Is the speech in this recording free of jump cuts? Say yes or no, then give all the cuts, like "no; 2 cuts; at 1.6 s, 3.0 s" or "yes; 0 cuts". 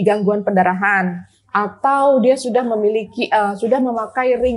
yes; 0 cuts